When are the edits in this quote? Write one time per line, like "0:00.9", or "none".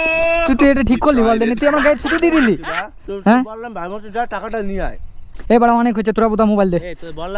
0:05.3

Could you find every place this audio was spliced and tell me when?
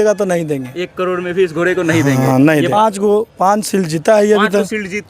0:02.7

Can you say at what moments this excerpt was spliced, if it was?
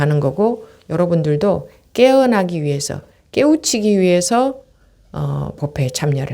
none

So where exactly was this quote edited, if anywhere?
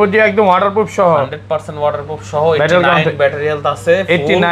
none

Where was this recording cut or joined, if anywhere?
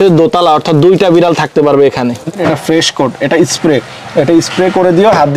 0:02.2

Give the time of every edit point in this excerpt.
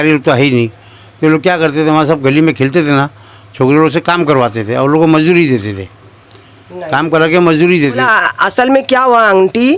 0:08.0

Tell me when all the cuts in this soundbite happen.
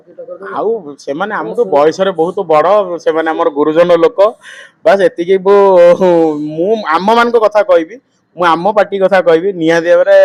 none

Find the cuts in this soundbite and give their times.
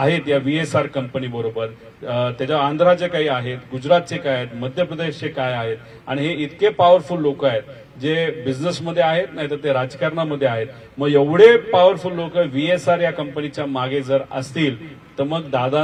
none

